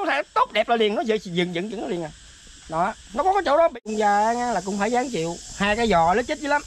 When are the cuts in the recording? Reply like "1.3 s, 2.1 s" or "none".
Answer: 3.9 s